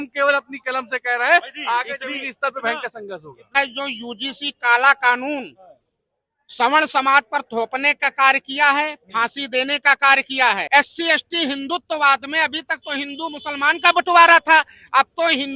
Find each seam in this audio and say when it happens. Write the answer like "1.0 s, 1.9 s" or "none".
3.6 s, 10.6 s